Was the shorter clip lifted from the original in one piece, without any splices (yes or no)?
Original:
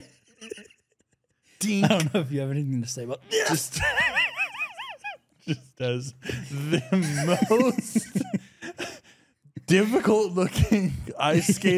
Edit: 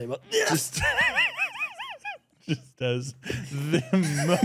yes